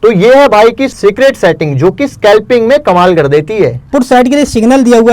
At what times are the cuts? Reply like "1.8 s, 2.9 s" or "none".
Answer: 0.9 s, 3.9 s